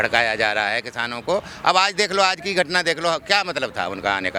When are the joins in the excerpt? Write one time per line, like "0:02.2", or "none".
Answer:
none